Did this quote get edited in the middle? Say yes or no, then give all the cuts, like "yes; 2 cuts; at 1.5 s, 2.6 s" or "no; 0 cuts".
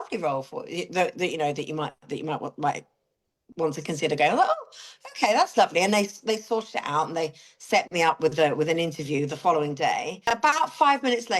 yes; 1 cut; at 10.3 s